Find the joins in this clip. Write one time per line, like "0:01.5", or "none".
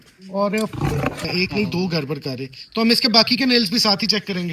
0:01.2